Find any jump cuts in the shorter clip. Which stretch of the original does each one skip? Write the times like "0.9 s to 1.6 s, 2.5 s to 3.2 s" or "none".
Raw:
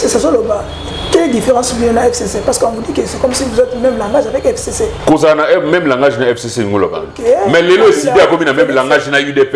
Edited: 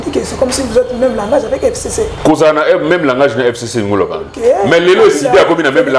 none